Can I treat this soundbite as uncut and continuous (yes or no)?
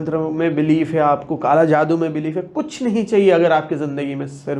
yes